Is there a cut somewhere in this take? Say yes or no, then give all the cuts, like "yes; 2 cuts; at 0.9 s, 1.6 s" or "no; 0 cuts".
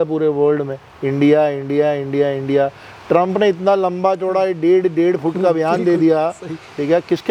no; 0 cuts